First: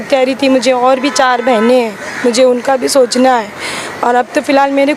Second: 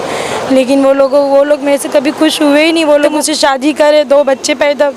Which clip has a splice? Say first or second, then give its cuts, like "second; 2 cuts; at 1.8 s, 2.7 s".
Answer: second; 1 cut; at 3.2 s